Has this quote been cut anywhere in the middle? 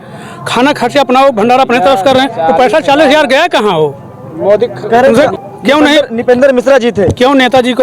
yes; 1 cut; at 5.4 s

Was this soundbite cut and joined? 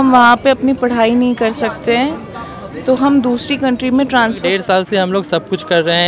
yes; 1 cut; at 4.4 s

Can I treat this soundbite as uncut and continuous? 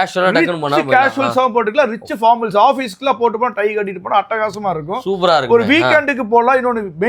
yes; 0 cuts

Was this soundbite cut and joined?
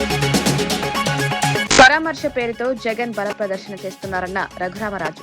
yes; 1 cut; at 1.6 s

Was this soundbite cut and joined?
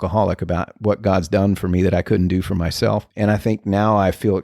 yes; 1 cut; at 3.1 s

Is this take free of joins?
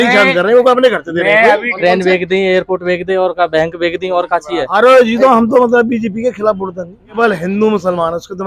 no; 3 cuts; at 1.7 s, 4.6 s, 7.2 s

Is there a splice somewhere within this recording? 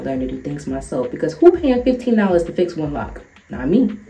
no; 0 cuts

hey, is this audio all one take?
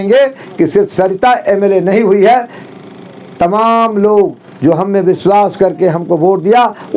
yes; 0 cuts

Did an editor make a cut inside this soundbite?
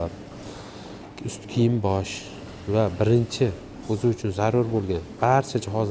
no; 0 cuts

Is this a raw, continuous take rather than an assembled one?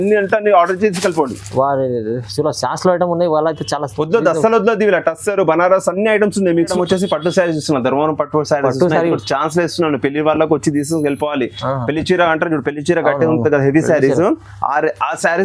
no; 1 cut; at 6.7 s

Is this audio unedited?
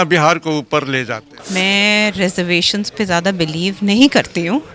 no; 1 cut; at 1.3 s

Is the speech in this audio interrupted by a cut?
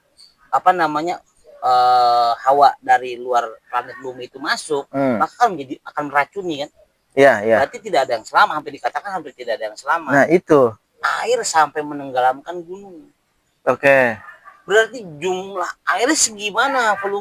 yes; 1 cut; at 10.9 s

